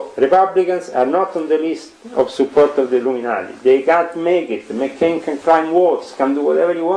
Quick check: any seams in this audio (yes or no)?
no